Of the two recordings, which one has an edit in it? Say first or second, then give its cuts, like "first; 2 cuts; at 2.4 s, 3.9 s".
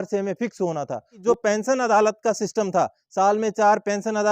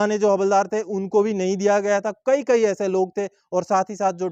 first; 1 cut; at 1.2 s